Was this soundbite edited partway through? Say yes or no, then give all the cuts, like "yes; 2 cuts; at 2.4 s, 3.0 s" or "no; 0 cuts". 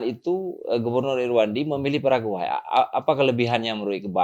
no; 0 cuts